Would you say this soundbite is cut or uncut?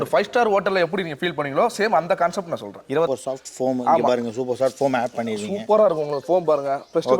cut